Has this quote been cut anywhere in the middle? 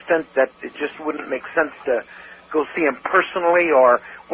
no; 0 cuts

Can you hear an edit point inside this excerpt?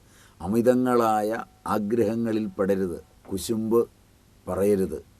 yes; 1 cut; at 3.1 s

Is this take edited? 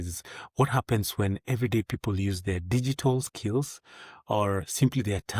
no; 0 cuts

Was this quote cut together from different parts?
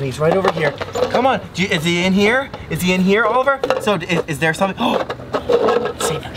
no; 0 cuts

